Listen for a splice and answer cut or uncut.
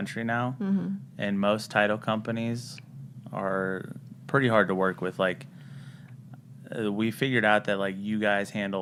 uncut